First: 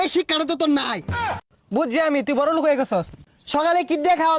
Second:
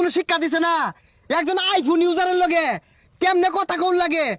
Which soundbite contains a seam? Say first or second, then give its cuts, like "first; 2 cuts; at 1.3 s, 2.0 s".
first; 2 cuts; at 1.4 s, 3.2 s